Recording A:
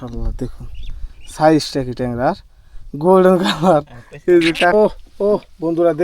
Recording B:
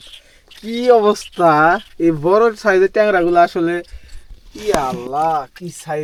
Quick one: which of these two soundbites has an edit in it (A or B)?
A